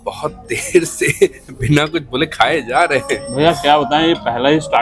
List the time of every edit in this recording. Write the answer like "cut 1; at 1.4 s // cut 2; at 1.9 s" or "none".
none